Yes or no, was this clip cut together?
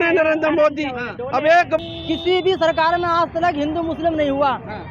yes